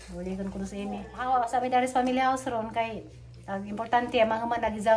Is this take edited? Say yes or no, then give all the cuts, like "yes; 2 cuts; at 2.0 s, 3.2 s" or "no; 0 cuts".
yes; 1 cut; at 1.1 s